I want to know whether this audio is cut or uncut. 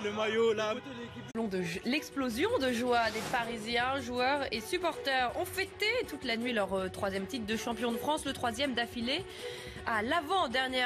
uncut